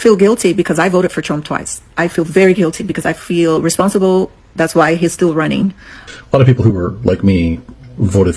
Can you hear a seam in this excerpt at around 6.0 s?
yes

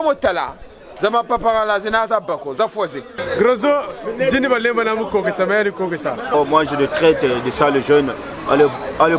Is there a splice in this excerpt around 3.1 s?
yes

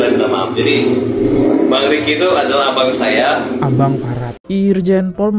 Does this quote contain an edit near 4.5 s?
yes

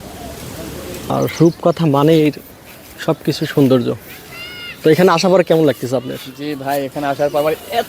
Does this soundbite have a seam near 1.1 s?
yes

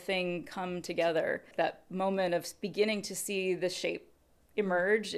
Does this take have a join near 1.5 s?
yes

